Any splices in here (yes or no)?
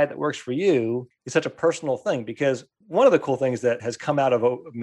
yes